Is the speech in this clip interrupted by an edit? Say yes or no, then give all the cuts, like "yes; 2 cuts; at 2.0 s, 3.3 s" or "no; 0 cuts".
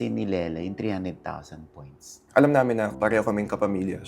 yes; 1 cut; at 2.2 s